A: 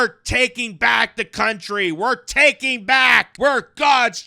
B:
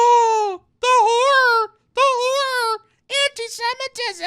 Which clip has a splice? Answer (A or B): A